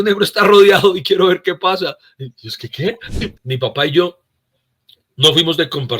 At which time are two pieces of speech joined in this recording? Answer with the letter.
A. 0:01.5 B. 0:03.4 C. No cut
B